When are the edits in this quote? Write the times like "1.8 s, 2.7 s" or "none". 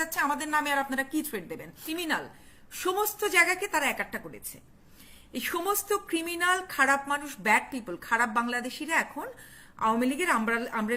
1.8 s